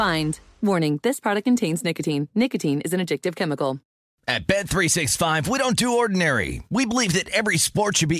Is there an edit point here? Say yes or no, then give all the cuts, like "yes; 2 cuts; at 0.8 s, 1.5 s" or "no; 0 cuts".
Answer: yes; 1 cut; at 3.9 s